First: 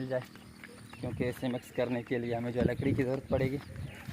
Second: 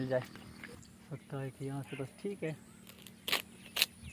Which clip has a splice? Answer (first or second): second